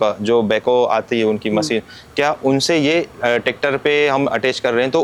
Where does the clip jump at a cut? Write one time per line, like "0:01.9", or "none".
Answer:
none